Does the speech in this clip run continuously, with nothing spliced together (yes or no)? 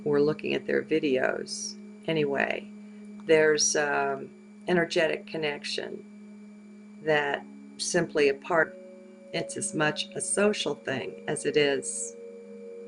yes